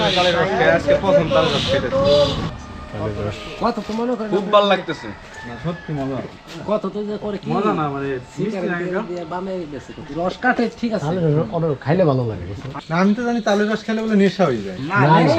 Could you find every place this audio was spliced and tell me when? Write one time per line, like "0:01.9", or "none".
0:02.5
0:12.7